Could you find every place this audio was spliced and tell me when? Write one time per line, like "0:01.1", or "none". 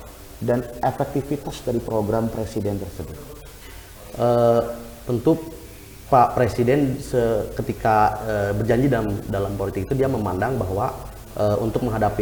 none